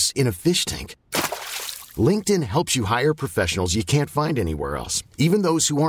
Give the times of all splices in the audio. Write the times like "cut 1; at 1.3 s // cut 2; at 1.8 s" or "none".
none